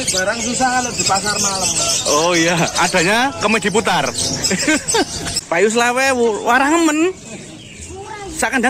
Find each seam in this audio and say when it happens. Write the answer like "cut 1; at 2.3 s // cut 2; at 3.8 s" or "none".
cut 1; at 5.3 s